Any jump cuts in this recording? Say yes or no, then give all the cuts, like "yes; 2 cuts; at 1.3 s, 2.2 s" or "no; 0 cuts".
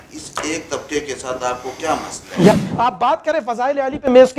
yes; 1 cut; at 2.5 s